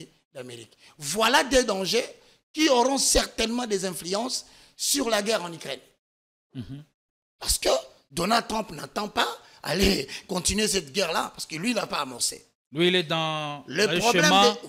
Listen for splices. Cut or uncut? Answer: uncut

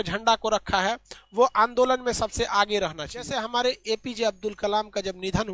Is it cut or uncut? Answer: cut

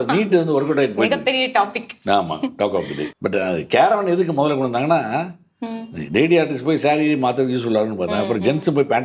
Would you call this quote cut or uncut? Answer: cut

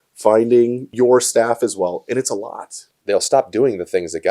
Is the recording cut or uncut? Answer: cut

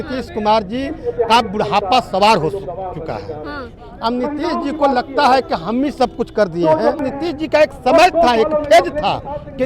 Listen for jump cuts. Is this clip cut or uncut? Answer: cut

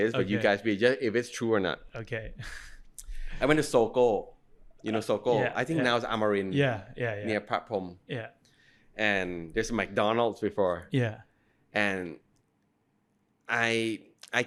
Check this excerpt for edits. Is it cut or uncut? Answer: uncut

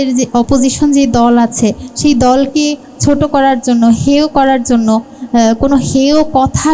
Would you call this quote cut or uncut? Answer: uncut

